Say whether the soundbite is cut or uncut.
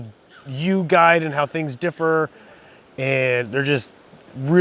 uncut